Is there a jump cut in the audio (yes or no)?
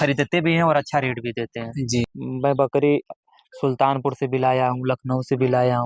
yes